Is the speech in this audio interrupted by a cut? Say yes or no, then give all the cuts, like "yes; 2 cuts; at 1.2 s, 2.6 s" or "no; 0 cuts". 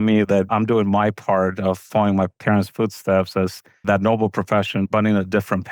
no; 0 cuts